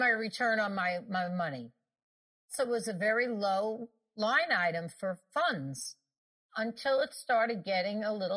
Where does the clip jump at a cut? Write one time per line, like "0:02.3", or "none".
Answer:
0:02.5
0:04.1
0:05.3
0:06.5

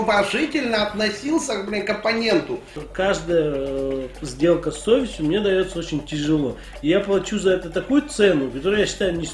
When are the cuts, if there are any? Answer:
0:02.8

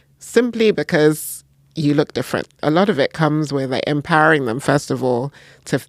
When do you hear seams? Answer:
0:02.6

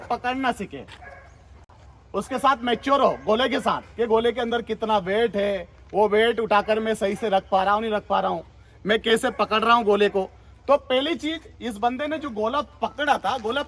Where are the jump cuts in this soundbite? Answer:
none

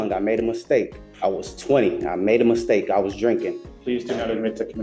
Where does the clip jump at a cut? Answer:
0:01.0
0:03.7

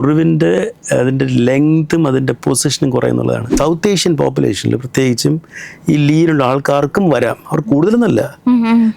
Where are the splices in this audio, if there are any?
0:03.5

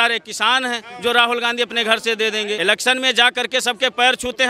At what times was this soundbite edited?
0:02.6

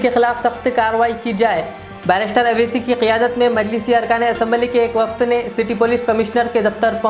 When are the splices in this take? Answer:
none

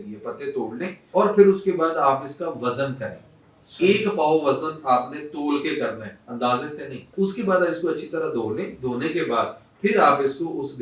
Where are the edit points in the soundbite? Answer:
0:01.0
0:07.1

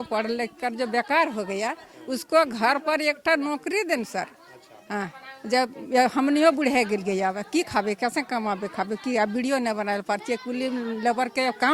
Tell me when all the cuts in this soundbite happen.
none

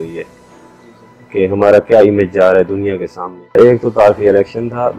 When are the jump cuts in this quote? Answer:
0:03.6

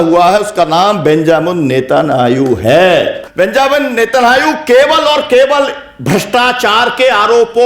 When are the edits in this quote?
0:03.2

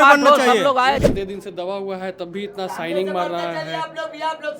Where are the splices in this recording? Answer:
0:01.0

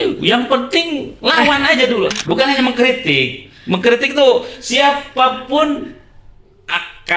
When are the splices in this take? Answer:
0:02.1

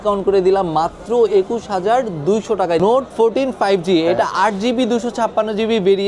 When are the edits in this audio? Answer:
0:02.8

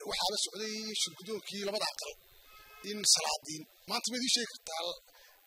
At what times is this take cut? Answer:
0:03.7

